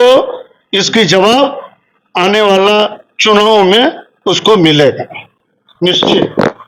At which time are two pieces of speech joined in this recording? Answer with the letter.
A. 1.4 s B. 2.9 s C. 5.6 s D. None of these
D